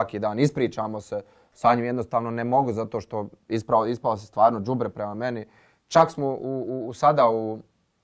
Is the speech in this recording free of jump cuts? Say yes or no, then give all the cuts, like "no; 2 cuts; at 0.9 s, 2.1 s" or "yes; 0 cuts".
yes; 0 cuts